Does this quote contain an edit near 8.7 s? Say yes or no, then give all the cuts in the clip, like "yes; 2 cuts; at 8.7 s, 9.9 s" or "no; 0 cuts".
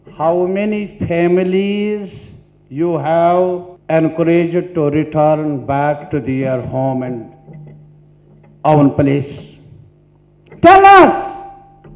no; 1 cut; at 3.7 s